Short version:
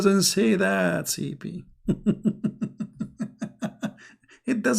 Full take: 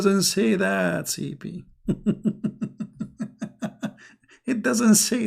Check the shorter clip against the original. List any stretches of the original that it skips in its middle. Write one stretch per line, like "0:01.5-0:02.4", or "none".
none